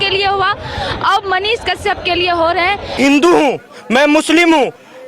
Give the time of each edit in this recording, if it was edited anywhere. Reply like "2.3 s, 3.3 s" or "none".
2.9 s